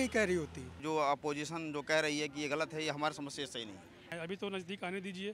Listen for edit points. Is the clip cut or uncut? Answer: cut